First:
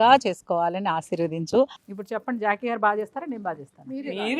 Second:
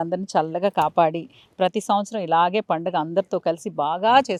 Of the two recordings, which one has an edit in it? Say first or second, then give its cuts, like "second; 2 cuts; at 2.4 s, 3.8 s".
first; 1 cut; at 1.8 s